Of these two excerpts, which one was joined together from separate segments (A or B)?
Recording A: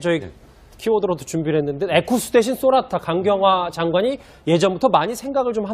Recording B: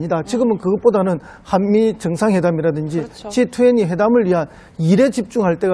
B